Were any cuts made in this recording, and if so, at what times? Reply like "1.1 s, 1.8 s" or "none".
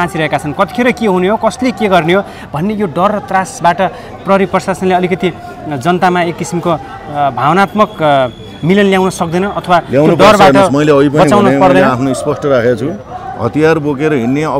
none